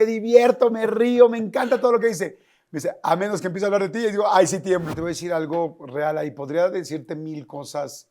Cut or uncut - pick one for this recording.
cut